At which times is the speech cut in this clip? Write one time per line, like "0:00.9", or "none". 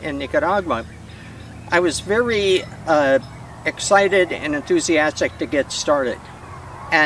none